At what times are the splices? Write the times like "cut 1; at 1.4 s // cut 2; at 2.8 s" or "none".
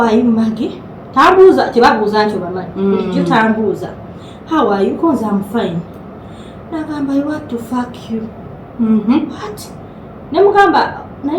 none